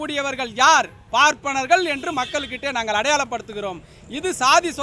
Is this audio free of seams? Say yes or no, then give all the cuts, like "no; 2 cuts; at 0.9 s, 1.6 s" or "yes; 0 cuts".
yes; 0 cuts